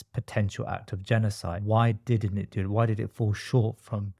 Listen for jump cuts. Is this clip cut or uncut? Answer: cut